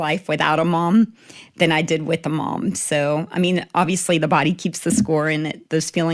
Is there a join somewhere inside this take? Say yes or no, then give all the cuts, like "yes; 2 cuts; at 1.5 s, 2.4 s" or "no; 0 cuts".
no; 0 cuts